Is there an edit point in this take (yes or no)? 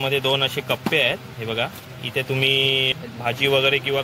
yes